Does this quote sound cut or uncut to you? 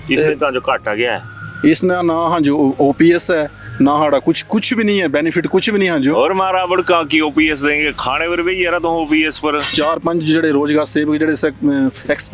cut